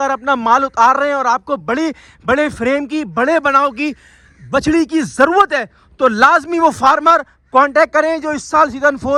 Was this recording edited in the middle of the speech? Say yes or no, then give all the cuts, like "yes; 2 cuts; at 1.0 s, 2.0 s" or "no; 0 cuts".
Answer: no; 0 cuts